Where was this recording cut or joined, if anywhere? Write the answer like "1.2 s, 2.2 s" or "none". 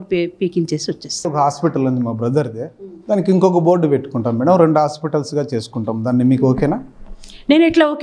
1.3 s